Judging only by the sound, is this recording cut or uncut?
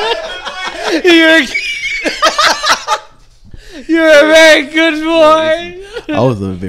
uncut